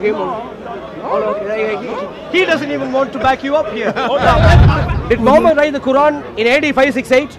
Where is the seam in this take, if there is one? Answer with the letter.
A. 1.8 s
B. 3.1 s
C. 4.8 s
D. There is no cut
C